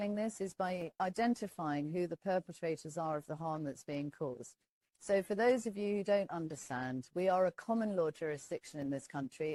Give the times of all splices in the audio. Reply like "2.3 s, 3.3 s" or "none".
none